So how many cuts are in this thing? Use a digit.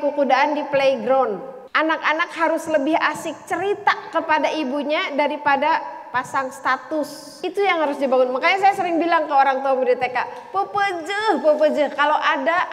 2